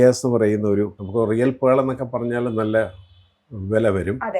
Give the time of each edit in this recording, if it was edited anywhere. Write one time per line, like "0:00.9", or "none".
0:01.0